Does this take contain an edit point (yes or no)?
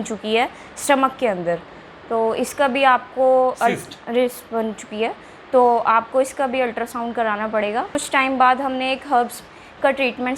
yes